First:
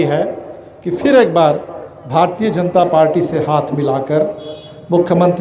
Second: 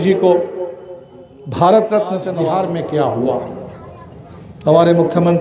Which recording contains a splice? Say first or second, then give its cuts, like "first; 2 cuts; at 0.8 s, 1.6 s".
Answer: second; 1 cut; at 2.3 s